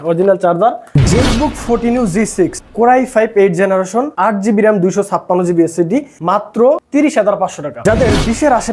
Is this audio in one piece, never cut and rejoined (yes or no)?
no